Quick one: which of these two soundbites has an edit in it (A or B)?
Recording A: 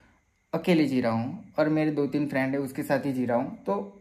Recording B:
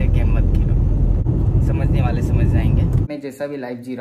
B